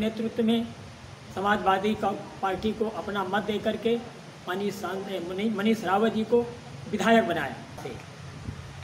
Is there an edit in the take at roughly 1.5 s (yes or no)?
no